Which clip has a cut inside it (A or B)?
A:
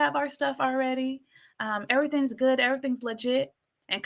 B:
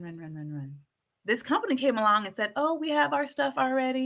B